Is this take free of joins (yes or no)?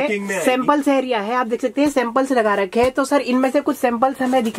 yes